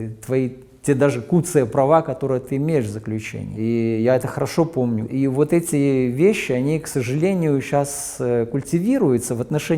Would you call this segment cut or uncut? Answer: cut